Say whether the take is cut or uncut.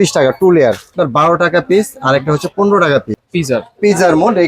cut